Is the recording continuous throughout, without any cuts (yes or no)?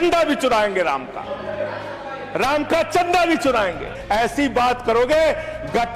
no